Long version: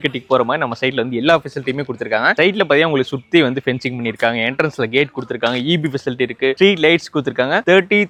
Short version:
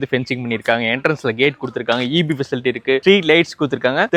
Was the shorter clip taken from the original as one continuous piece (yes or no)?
yes